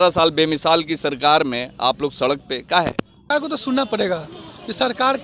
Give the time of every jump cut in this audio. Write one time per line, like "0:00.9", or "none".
0:03.3